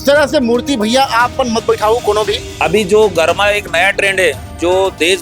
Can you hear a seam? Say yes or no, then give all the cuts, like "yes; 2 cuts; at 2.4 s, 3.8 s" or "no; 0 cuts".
yes; 1 cut; at 2.5 s